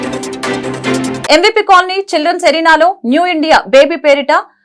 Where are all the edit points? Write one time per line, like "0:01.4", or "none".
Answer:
0:01.2